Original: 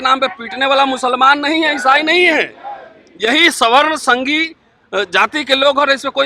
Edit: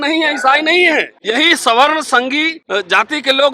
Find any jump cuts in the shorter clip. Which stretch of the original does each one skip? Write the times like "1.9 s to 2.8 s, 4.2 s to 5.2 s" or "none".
2.5 s to 3.1 s, 4.5 s to 4.8 s